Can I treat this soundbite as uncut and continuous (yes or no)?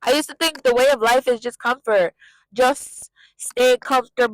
yes